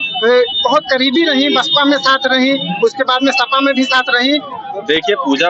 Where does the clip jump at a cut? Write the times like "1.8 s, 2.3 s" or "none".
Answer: 4.5 s